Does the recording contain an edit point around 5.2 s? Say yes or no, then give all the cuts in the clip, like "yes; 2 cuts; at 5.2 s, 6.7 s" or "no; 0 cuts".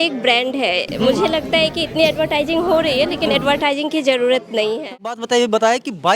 yes; 1 cut; at 5.2 s